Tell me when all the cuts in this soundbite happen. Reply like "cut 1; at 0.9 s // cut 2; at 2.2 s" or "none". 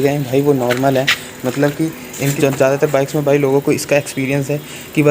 cut 1; at 2.3 s